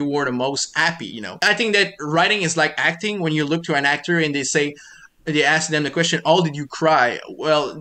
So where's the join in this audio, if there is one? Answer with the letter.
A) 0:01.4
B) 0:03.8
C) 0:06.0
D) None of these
A